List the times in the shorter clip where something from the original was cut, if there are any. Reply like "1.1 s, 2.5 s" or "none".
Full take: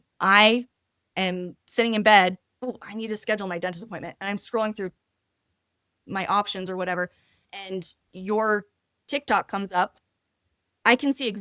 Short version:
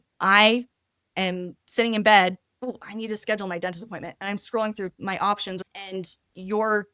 5.0 s, 5.6 s